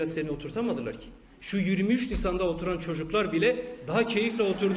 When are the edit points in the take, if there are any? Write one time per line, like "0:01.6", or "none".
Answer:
none